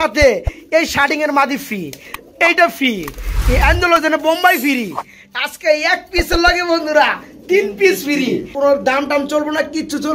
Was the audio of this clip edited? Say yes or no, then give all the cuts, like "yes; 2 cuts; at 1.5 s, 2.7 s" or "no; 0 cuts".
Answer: yes; 1 cut; at 8.5 s